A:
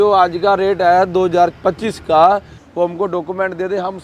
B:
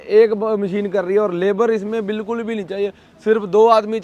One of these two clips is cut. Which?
A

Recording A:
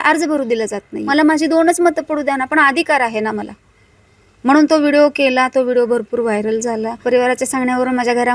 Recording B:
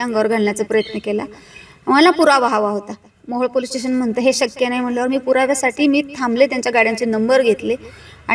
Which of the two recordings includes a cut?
A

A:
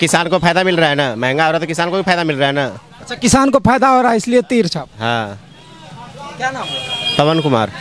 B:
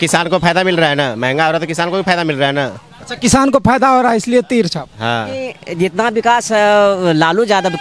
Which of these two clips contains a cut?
B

